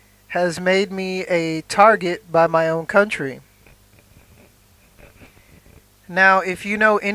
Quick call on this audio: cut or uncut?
uncut